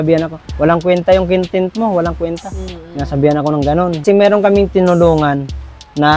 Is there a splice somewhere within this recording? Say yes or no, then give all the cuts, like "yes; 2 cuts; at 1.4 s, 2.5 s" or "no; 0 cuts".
yes; 1 cut; at 4.0 s